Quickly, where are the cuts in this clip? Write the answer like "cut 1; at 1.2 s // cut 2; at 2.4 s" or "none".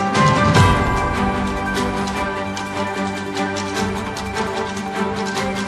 none